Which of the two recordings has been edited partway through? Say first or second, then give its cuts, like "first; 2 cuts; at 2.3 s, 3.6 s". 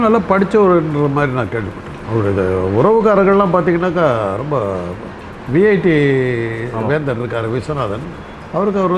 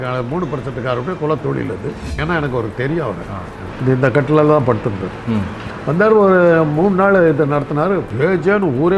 second; 4 cuts; at 2.1 s, 3.6 s, 5.6 s, 8.1 s